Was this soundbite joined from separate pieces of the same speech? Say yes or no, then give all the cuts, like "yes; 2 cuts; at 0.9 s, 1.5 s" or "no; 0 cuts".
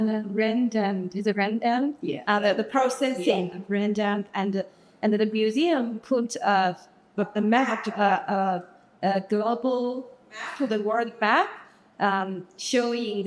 no; 0 cuts